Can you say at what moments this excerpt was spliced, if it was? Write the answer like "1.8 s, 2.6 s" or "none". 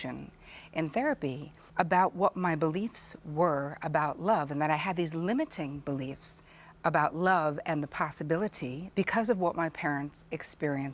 1.5 s, 8.8 s